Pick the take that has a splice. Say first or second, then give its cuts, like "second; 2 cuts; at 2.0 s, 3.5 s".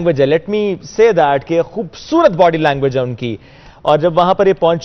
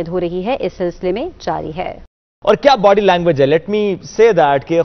second; 1 cut; at 2.3 s